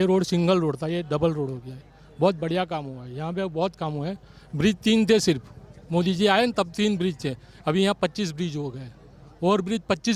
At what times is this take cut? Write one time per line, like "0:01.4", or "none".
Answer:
none